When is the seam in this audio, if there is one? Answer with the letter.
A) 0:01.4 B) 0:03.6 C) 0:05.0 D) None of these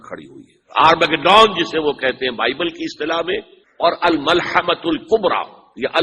B